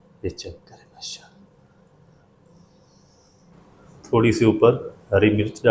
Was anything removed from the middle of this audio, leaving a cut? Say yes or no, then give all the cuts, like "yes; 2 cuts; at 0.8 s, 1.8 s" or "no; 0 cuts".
no; 0 cuts